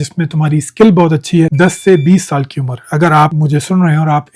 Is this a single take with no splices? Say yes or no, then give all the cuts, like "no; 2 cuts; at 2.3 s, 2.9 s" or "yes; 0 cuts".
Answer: no; 2 cuts; at 1.5 s, 3.3 s